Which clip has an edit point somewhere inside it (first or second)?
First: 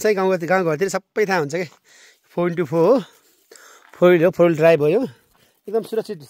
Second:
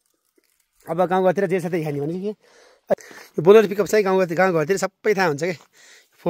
second